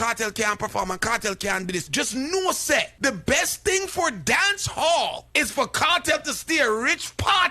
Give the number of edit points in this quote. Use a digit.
3